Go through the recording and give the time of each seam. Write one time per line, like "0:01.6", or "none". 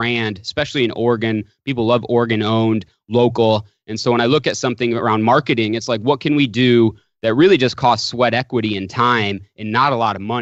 none